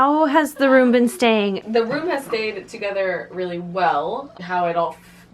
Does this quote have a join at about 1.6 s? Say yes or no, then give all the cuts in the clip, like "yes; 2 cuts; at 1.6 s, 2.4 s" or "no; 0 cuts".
yes; 2 cuts; at 1.6 s, 4.3 s